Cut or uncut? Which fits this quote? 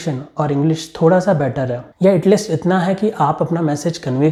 uncut